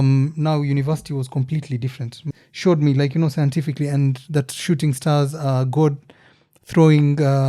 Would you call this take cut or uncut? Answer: cut